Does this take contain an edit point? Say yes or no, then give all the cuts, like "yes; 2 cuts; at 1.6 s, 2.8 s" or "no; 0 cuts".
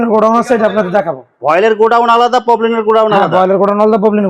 no; 0 cuts